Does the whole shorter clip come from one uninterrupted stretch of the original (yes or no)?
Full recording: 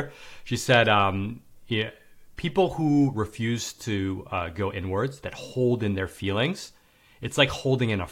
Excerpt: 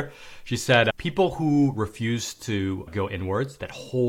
no